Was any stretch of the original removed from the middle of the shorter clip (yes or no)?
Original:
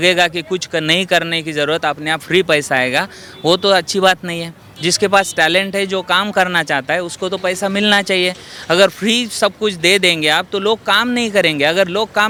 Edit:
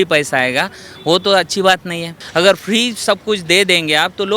yes